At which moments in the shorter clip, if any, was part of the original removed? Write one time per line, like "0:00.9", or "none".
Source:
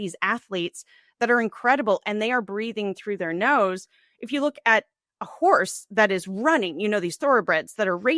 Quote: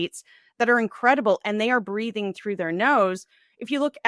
none